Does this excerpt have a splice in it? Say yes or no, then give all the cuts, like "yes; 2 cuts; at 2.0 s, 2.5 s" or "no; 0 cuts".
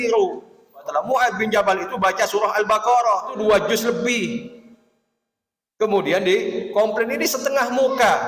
yes; 2 cuts; at 0.9 s, 3.4 s